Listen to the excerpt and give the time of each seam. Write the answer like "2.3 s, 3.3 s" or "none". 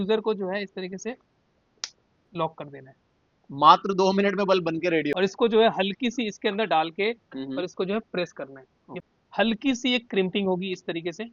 5.1 s, 9.0 s